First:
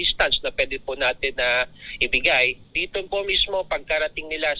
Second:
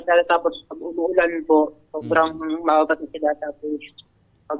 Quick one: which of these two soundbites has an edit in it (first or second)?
first